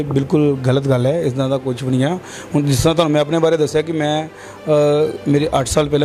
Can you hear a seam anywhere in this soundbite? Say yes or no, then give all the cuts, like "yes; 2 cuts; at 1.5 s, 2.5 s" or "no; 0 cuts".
no; 0 cuts